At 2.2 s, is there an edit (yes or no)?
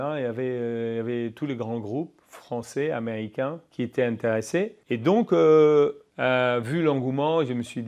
no